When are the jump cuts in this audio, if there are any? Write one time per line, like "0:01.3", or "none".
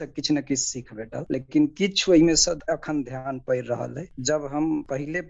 0:02.6
0:04.1